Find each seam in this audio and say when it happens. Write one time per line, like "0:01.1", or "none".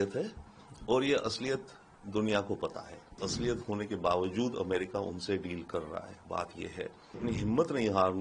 0:03.2
0:07.2